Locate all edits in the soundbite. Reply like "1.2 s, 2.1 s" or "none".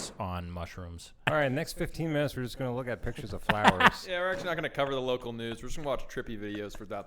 1.2 s